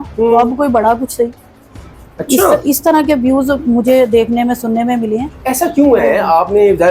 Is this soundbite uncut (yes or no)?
yes